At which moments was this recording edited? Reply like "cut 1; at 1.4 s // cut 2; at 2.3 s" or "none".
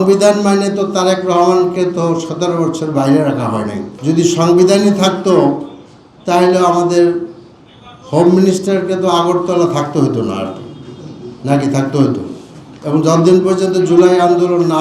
cut 1; at 3.9 s